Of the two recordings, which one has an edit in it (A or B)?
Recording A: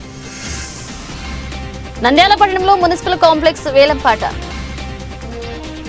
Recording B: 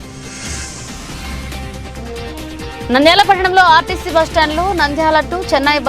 A